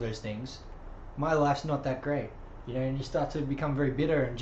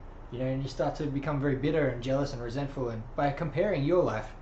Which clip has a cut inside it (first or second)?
second